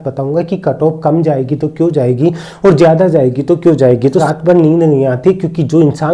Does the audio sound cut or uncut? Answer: cut